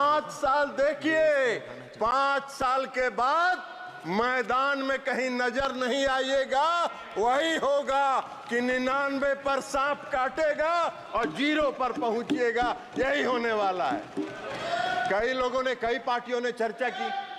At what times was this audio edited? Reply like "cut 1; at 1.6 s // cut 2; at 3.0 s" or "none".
none